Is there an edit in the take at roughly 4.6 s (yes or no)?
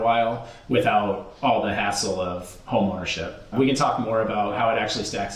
yes